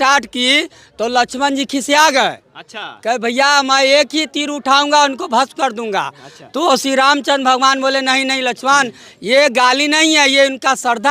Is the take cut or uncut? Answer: uncut